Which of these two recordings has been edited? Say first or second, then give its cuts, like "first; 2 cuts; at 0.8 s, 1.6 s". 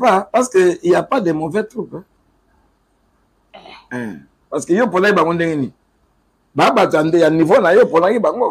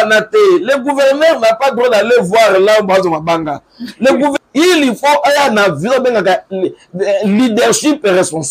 second; 1 cut; at 4.3 s